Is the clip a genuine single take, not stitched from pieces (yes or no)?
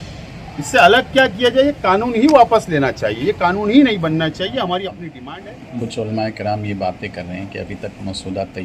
no